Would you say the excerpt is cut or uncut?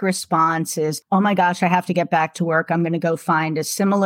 cut